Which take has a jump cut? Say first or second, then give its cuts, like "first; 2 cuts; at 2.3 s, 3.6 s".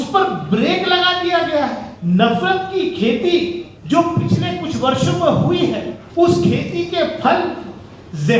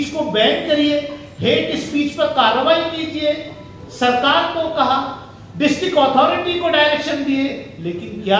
first; 3 cuts; at 1.9 s, 3.7 s, 6.0 s